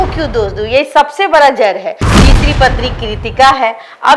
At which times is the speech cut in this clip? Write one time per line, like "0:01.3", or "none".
0:02.1